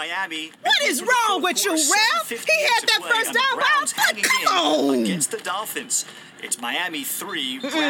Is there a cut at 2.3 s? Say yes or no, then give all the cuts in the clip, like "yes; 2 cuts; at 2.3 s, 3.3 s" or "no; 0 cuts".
yes; 1 cut; at 2.3 s